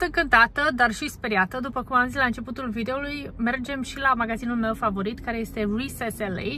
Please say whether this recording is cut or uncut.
uncut